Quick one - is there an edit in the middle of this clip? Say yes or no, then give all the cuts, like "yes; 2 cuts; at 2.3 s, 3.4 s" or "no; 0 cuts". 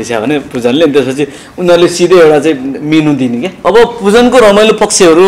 yes; 1 cut; at 3.5 s